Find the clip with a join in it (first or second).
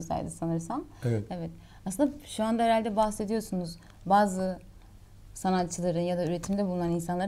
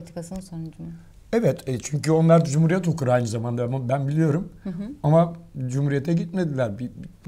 first